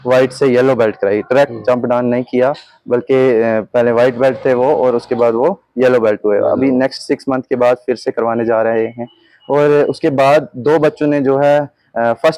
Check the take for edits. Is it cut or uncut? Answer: uncut